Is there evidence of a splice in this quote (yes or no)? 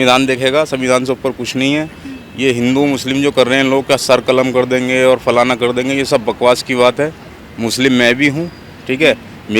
no